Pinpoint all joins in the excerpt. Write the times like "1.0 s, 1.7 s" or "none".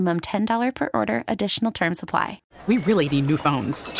2.4 s